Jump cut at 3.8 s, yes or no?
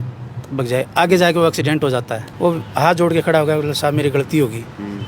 no